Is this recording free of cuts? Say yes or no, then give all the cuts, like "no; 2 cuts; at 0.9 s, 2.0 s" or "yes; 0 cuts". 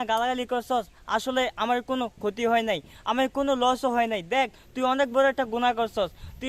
yes; 0 cuts